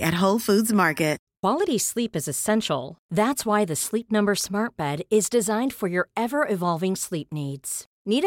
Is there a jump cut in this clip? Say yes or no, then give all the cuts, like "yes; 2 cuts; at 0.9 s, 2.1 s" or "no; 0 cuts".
yes; 1 cut; at 1.3 s